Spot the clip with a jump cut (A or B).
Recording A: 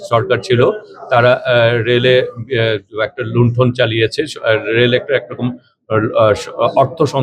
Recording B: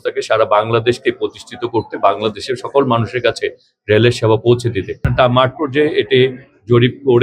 B